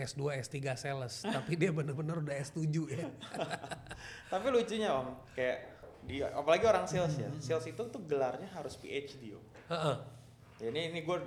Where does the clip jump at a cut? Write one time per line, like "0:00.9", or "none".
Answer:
none